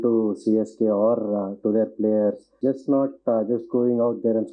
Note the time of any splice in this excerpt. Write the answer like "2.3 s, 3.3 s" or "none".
2.5 s